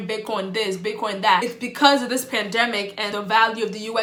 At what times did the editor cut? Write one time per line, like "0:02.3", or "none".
none